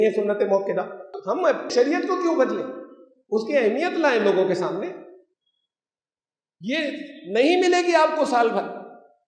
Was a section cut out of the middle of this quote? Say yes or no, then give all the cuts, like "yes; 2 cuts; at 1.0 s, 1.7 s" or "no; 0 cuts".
yes; 1 cut; at 1.2 s